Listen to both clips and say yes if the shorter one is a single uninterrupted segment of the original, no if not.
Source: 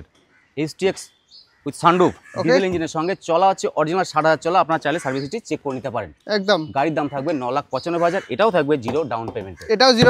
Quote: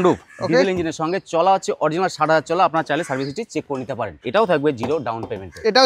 no